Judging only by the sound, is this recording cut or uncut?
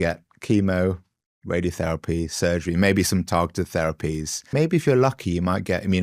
cut